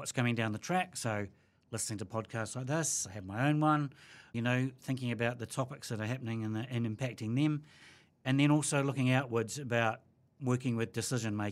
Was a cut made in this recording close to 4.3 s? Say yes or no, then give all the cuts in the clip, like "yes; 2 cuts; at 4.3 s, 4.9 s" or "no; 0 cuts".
no; 0 cuts